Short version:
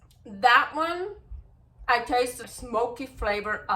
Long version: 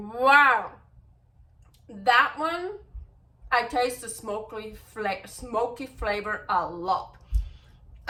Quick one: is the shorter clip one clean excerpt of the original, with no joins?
no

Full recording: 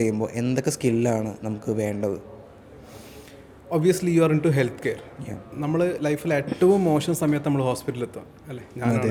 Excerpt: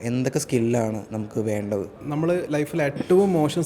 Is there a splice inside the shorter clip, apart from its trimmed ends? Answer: yes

